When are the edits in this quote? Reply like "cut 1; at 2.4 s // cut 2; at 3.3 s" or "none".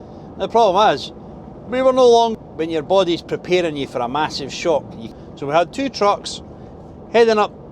cut 1; at 2.3 s // cut 2; at 5.0 s